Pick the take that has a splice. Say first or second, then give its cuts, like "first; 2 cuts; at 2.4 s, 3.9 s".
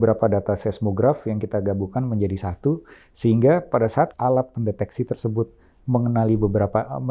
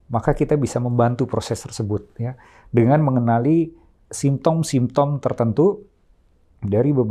first; 1 cut; at 4.1 s